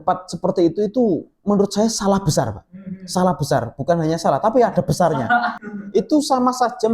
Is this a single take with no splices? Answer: no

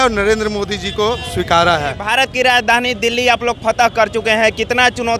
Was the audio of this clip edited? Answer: yes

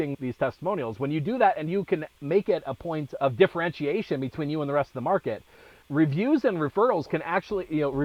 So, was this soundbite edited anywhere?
no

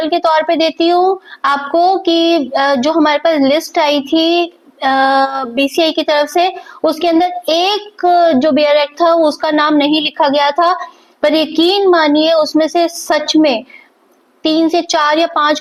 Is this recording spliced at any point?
no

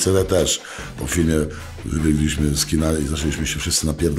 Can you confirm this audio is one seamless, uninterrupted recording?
yes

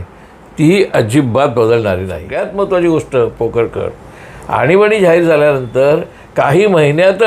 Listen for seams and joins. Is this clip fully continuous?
no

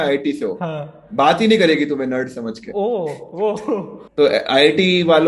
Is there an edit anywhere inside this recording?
yes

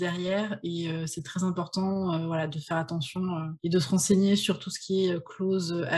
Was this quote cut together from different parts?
yes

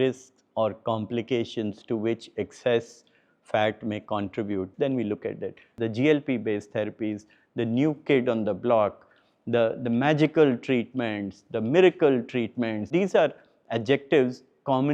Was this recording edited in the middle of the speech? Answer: yes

